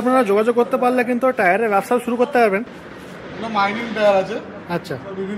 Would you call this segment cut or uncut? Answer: cut